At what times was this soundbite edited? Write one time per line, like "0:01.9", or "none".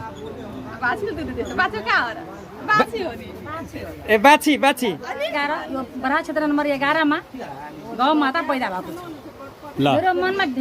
0:05.4